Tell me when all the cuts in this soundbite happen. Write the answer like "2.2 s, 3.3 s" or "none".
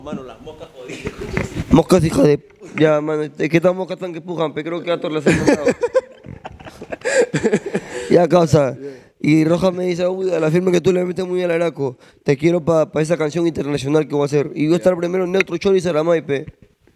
none